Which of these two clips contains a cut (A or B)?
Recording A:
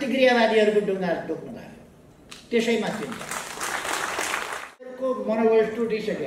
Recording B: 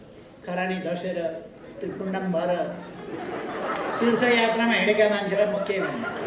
A